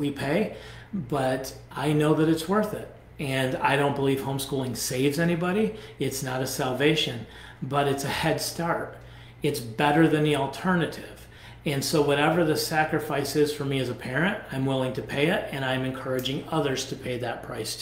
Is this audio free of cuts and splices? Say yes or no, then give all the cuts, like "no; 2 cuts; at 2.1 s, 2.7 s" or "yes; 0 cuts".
yes; 0 cuts